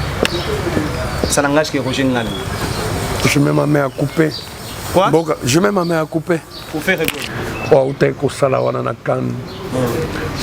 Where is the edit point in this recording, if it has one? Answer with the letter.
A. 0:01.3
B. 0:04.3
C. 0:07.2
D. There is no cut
C